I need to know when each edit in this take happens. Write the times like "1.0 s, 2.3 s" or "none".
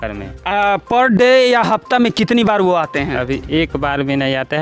none